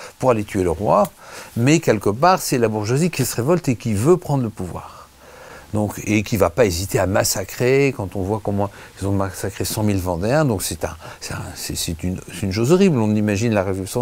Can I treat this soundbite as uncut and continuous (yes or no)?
yes